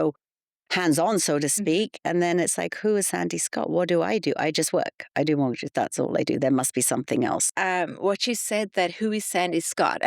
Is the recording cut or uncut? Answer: cut